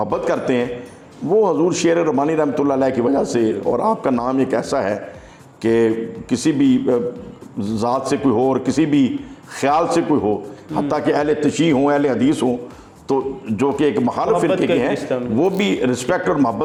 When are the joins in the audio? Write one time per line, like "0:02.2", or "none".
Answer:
none